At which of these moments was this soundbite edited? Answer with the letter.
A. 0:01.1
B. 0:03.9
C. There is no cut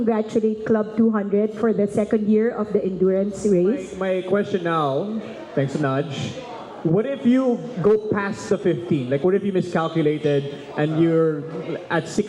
B